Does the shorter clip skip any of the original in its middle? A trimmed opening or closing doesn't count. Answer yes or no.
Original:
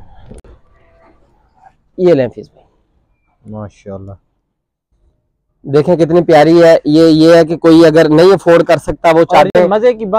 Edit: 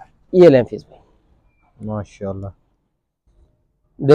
no